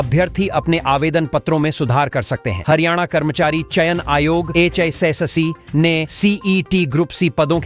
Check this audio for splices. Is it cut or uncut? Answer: uncut